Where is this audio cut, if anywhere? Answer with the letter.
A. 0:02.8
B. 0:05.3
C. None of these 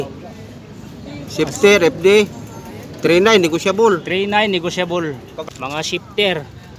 B